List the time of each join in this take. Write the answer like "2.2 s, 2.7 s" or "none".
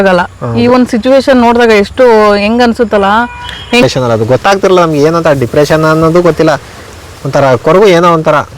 3.8 s